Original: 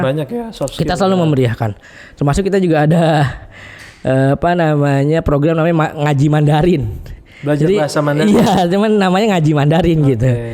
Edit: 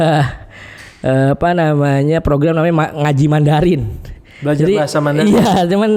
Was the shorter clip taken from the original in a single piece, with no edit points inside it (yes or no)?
yes